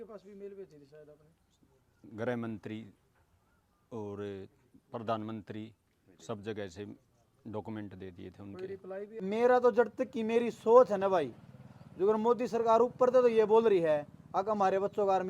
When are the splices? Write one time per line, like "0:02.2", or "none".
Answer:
0:09.2